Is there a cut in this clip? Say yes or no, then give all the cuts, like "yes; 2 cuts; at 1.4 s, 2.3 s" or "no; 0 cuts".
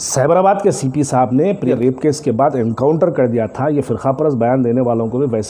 yes; 1 cut; at 1.7 s